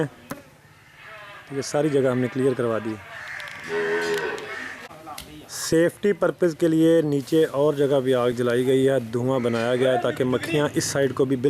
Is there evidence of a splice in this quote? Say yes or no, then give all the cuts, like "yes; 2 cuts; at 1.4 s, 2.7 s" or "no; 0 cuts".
no; 0 cuts